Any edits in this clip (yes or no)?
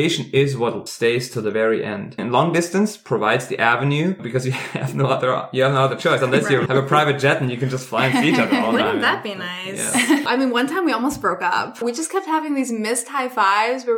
yes